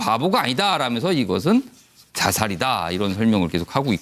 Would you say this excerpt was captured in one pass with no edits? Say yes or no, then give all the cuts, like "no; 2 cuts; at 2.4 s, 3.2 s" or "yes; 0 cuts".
yes; 0 cuts